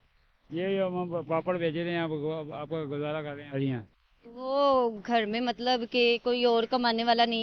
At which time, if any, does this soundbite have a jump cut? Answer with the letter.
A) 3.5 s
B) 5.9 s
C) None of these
A